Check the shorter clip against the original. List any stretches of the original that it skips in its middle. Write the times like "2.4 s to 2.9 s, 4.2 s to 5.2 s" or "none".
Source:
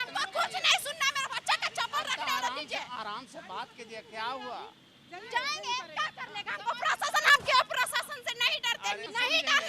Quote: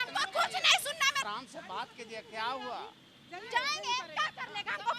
1.2 s to 3.0 s